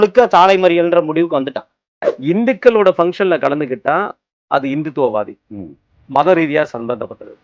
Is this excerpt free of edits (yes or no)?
no